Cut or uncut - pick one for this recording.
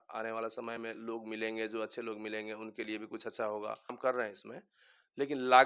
cut